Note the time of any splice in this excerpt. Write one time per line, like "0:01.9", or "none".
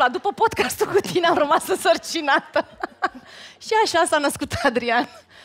none